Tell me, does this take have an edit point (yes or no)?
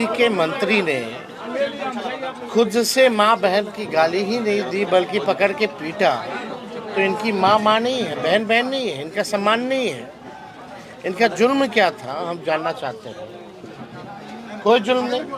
no